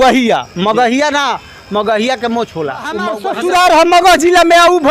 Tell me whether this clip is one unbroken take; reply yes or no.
no